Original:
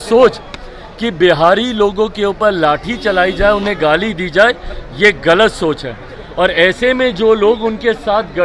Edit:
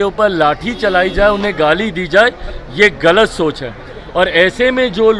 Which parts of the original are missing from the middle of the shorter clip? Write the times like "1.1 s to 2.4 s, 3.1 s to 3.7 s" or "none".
none